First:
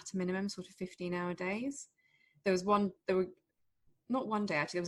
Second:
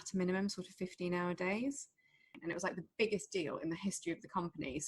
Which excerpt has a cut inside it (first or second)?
second